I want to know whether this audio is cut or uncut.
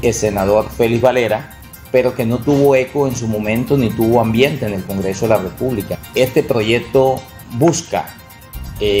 cut